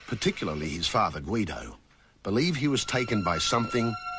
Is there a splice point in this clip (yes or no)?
yes